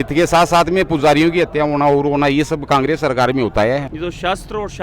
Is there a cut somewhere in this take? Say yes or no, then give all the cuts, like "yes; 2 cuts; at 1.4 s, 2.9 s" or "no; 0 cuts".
yes; 1 cut; at 3.9 s